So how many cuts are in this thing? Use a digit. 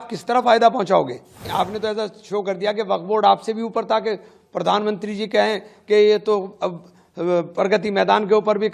1